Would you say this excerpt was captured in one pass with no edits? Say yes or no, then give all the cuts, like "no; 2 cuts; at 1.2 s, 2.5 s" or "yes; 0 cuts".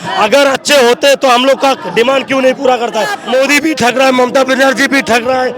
no; 1 cut; at 3.2 s